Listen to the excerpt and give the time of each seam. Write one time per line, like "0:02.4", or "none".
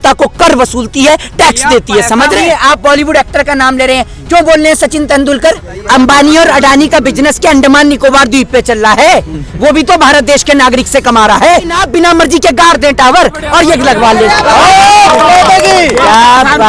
0:02.4
0:05.7
0:11.8